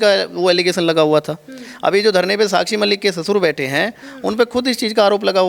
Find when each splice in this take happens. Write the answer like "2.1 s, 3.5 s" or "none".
none

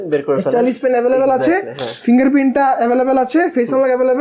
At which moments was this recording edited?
none

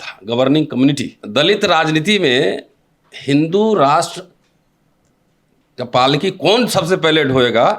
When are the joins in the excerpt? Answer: 1.1 s

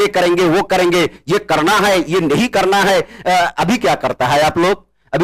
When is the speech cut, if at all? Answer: none

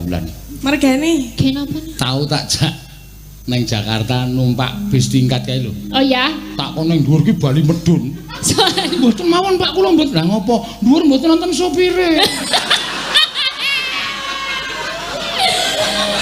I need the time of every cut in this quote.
none

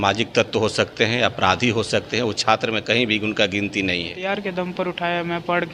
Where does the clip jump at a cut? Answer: 4.2 s

